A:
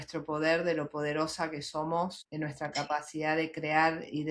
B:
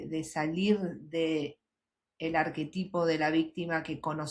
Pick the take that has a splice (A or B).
A